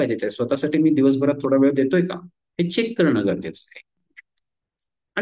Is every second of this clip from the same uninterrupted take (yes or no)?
no